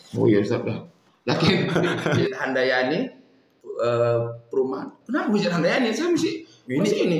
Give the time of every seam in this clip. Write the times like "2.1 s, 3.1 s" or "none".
2.2 s